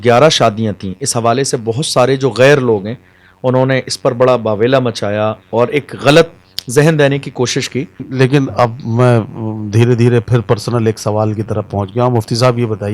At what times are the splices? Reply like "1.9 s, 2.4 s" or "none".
8.0 s